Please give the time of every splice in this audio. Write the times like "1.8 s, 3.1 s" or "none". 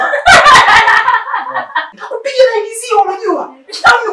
2.0 s